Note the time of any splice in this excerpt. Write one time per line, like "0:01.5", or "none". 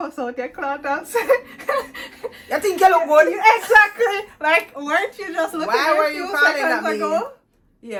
none

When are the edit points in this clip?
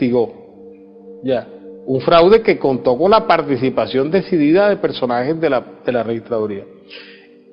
none

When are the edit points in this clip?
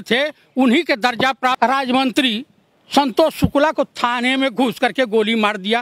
0:01.6

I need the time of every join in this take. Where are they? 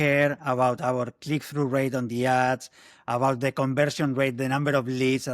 none

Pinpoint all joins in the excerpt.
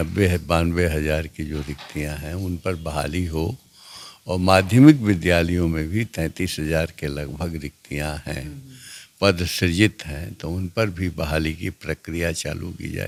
none

